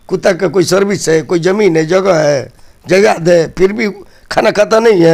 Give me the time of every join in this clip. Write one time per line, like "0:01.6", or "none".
none